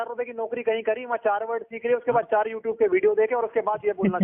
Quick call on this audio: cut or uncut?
uncut